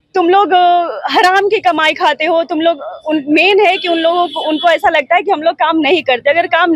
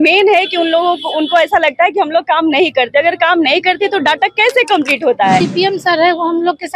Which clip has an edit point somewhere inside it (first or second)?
second